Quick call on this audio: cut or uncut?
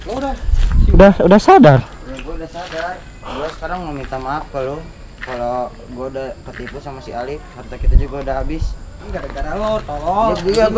cut